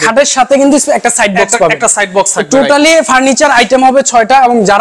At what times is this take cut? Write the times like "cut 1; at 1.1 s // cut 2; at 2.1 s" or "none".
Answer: none